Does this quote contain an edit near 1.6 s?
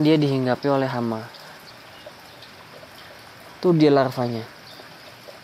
yes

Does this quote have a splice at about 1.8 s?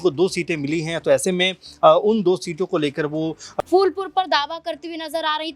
no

